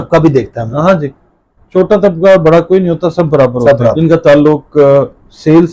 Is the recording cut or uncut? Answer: cut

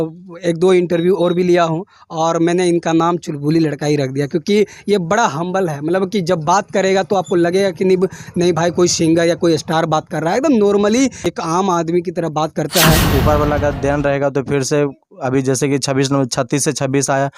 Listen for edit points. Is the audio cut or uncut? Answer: cut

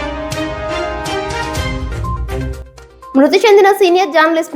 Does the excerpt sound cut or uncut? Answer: cut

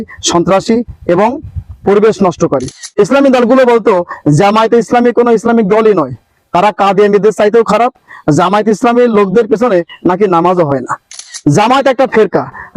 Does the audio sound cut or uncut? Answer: uncut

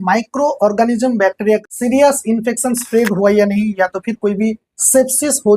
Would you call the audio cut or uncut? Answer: cut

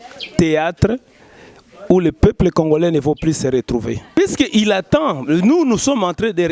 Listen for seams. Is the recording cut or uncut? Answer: cut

